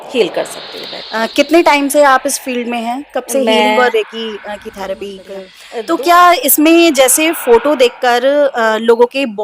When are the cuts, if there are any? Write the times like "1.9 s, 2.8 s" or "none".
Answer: 5.6 s